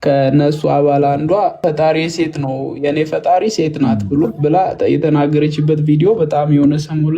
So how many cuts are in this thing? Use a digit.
1